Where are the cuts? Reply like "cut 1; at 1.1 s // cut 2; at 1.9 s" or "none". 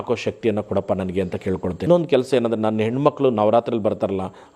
cut 1; at 1.9 s